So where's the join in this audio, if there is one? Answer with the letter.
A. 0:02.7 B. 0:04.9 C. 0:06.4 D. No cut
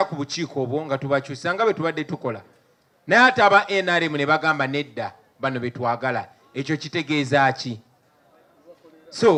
D